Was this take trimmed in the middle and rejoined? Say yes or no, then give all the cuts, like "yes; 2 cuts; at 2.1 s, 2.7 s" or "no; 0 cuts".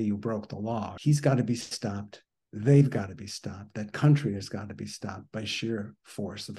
yes; 1 cut; at 0.9 s